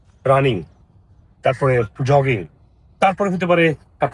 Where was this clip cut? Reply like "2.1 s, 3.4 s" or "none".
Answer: none